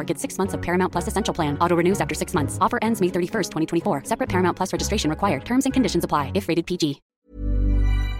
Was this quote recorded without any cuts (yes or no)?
no